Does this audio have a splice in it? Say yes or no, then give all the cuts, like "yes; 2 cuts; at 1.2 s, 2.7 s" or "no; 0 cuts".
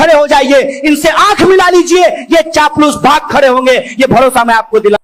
no; 0 cuts